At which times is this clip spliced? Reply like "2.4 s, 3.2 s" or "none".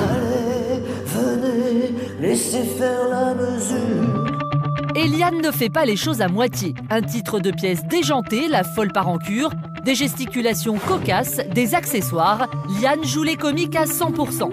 4.9 s